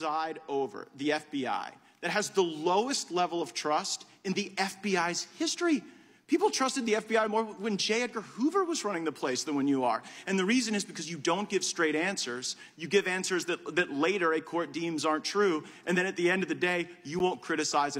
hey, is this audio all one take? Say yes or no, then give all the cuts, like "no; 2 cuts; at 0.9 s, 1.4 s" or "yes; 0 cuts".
yes; 0 cuts